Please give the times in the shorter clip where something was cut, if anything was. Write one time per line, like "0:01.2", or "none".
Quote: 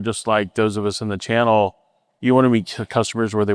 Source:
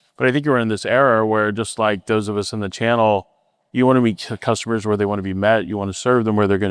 none

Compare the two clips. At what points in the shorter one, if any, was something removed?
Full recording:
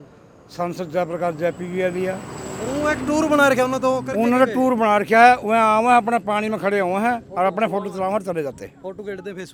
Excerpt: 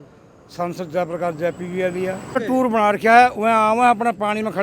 0:02.4

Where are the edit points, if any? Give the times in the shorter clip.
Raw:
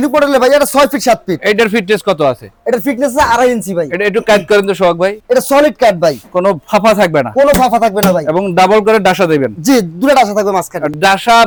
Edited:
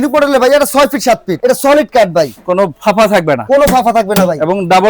0:01.3

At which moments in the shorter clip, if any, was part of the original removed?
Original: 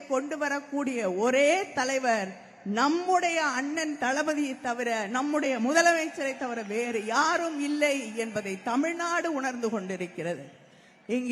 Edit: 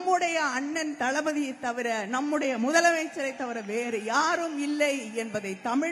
none

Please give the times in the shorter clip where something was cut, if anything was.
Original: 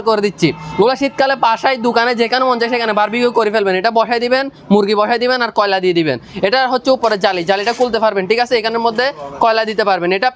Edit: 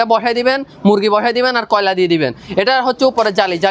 none

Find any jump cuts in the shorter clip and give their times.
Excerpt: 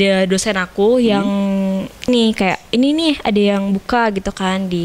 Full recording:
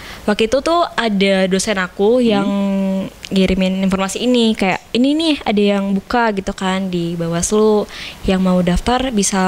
0:02.1

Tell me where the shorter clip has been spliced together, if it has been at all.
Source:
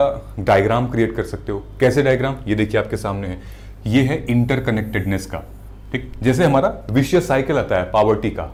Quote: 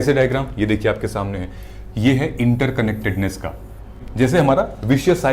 0:04.0

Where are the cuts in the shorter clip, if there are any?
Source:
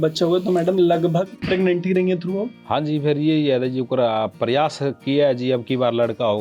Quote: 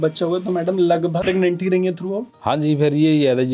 0:01.2

